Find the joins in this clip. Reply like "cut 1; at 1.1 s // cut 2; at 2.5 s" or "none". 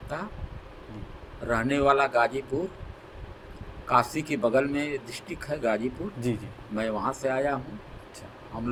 none